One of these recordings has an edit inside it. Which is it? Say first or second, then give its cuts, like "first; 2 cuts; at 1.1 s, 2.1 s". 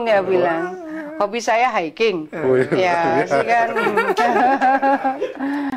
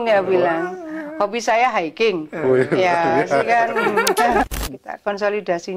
second; 1 cut; at 4.4 s